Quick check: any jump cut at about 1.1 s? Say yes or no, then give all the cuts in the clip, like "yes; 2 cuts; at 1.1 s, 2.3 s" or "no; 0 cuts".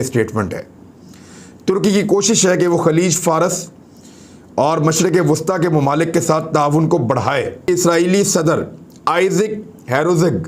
no; 1 cut; at 7.7 s